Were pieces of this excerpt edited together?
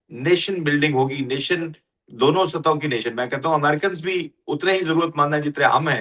no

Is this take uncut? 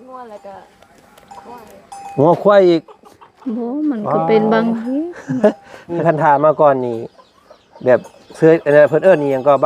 no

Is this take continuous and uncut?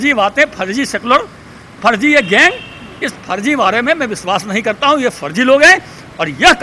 yes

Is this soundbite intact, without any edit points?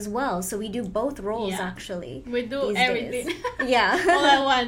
yes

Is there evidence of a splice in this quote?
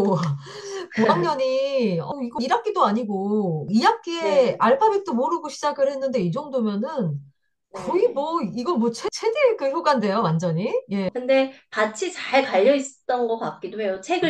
no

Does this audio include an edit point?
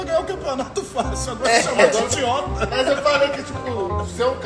no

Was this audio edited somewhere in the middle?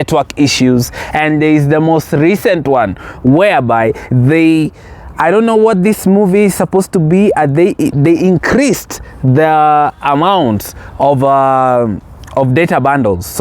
no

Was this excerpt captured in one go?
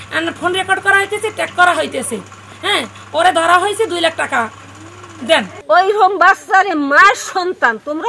no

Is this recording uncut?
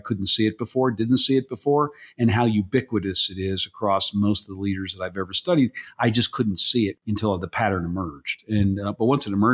no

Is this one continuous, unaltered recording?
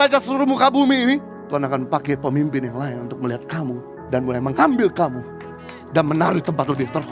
no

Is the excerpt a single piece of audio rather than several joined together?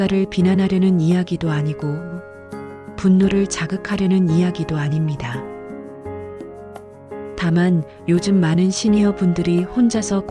yes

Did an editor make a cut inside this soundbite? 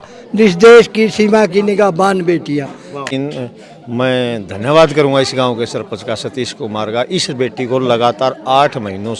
yes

